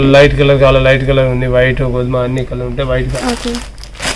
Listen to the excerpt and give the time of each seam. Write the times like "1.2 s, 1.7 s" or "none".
3.1 s